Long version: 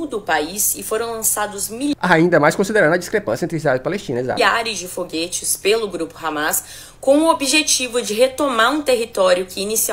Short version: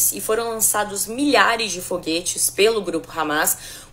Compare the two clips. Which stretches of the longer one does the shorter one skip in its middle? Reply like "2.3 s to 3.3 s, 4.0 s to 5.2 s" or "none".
1.9 s to 4.4 s